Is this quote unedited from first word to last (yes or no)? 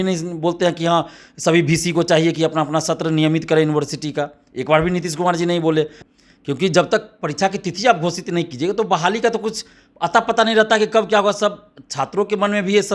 no